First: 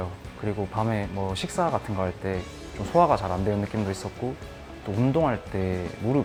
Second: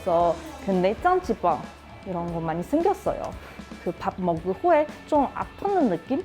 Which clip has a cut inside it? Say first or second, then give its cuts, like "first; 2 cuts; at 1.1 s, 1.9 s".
second; 1 cut; at 3.6 s